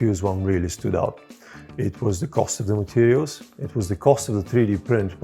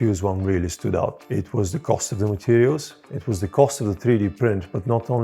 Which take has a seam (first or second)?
second